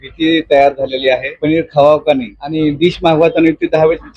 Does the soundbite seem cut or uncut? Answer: cut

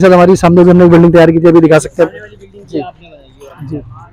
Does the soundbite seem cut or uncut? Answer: uncut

